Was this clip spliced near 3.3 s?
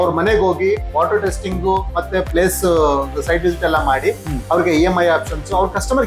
no; 0 cuts

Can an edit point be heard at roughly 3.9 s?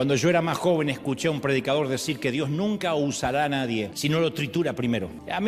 yes; 1 cut; at 3.9 s

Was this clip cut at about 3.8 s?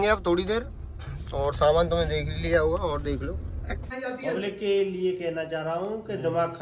yes; 1 cut; at 3.8 s

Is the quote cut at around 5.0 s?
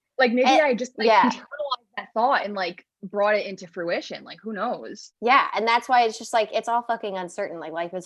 yes; 1 cut; at 5.0 s

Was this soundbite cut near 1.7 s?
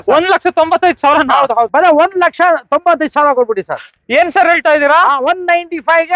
yes; 1 cut; at 1.7 s

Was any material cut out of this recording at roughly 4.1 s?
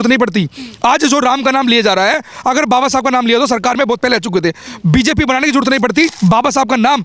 no; 1 cut; at 6.1 s

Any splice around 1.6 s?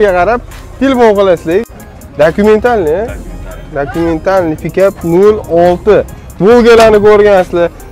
yes; 1 cut; at 1.6 s

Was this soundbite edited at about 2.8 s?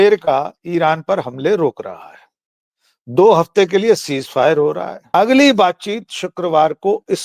no; 1 cut; at 4.9 s

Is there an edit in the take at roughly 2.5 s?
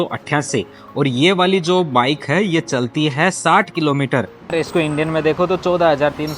no; 1 cut; at 4.5 s

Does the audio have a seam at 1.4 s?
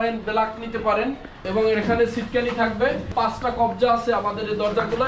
yes; 2 cuts; at 1.4 s, 3.1 s

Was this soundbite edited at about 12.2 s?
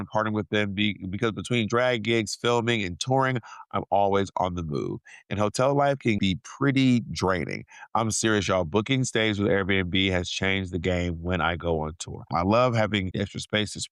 yes; 1 cut; at 12.2 s

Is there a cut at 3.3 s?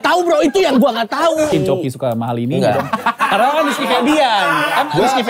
no; 1 cut; at 1.5 s

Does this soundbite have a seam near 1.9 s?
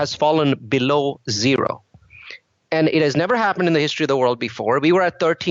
no; 0 cuts

